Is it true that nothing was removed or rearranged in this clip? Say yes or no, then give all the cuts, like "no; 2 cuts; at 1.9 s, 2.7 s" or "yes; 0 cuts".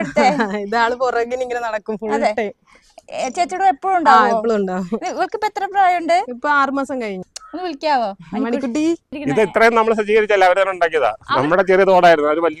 no; 2 cuts; at 7.3 s, 9.1 s